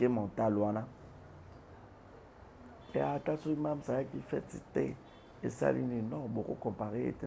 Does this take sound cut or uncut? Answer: uncut